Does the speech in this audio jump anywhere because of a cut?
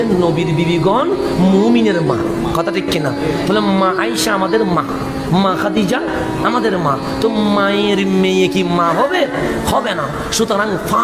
no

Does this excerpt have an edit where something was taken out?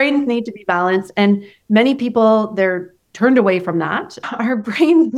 yes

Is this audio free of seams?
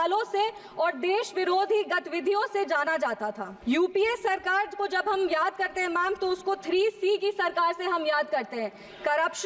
no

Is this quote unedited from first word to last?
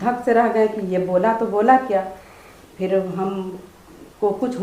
yes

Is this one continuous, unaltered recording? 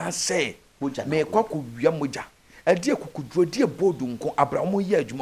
yes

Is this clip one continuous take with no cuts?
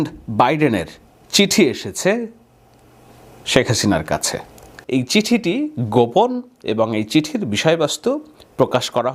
yes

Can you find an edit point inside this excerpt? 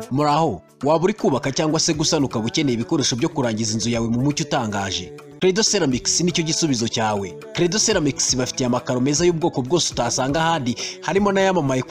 no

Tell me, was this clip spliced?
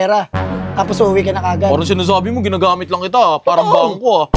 no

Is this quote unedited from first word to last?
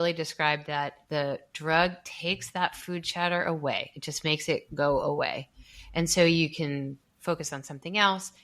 no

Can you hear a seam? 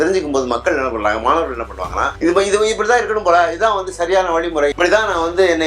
yes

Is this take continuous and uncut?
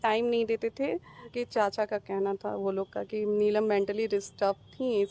no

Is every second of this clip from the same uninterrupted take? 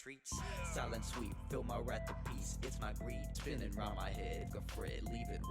no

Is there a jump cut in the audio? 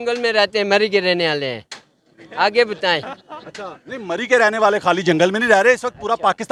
no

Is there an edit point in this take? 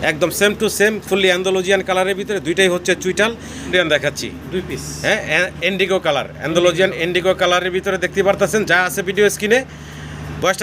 yes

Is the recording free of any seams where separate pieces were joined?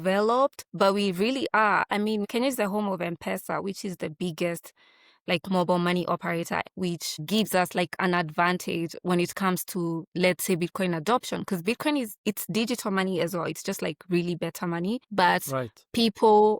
no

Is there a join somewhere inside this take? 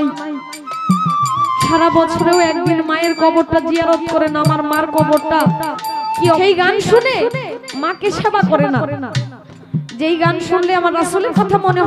yes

